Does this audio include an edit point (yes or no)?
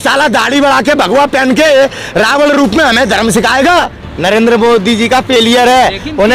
yes